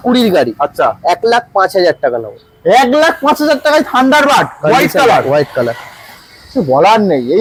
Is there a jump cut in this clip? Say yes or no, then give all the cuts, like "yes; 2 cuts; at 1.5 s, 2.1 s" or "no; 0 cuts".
no; 0 cuts